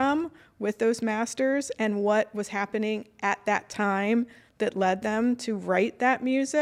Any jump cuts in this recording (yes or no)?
no